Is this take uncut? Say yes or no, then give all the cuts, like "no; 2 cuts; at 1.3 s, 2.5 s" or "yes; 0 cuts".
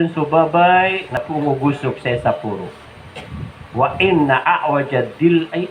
no; 1 cut; at 1.2 s